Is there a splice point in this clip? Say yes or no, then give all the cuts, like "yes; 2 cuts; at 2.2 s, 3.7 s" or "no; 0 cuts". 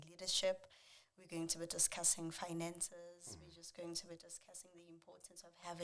no; 0 cuts